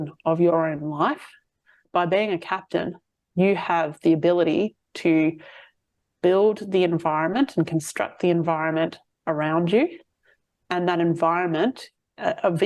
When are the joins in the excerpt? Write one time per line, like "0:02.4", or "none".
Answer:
0:01.8